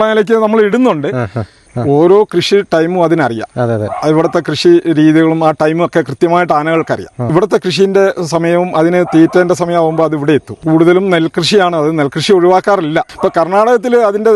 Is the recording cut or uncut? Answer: cut